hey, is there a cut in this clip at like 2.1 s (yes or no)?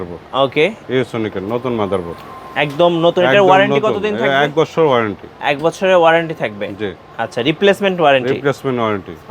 no